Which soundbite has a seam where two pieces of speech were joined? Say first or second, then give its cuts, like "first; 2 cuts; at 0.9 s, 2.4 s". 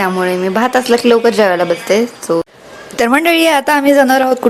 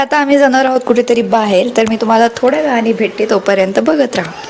first; 1 cut; at 2.5 s